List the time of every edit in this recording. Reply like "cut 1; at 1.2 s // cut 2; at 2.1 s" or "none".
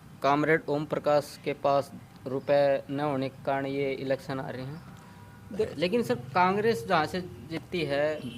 cut 1; at 5.6 s